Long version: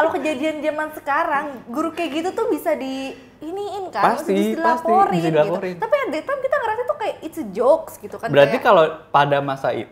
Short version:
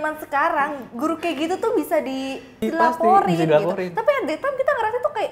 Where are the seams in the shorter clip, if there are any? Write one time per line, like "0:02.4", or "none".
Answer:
0:02.6